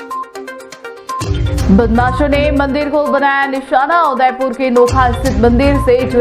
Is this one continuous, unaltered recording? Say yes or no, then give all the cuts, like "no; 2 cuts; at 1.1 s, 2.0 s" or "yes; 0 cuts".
no; 1 cut; at 1.2 s